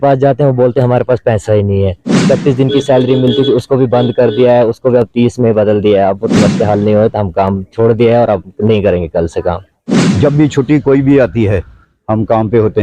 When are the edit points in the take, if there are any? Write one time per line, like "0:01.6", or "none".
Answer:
0:02.2
0:06.3
0:09.8